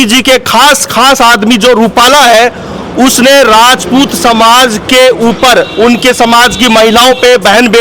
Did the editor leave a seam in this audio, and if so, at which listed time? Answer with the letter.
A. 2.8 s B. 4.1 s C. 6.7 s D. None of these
D